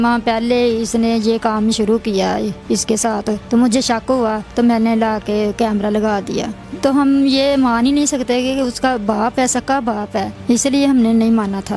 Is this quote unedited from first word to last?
no; 4 cuts; at 3.4 s, 4.4 s, 6.6 s, 10.3 s

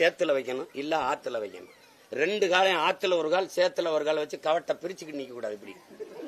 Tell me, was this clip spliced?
no; 0 cuts

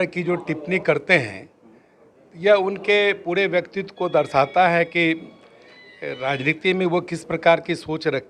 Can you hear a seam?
no; 0 cuts

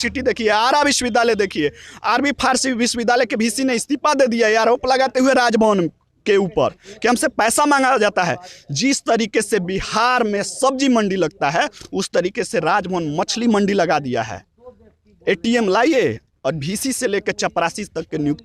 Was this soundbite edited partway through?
no; 0 cuts

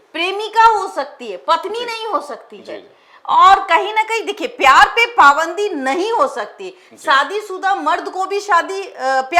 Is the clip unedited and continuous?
yes; 0 cuts

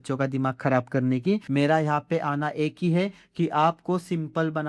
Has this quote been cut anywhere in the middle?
yes; 1 cut; at 1.4 s

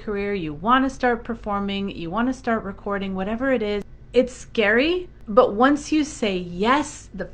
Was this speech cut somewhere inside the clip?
yes; 2 cuts; at 4.0 s, 5.1 s

